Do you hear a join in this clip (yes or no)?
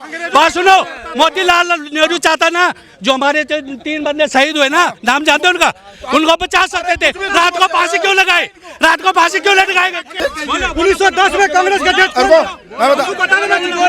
yes